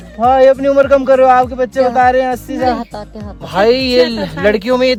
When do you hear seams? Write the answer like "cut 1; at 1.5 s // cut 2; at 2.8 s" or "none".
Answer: none